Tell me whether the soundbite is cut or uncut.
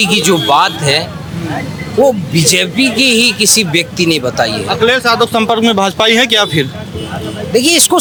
uncut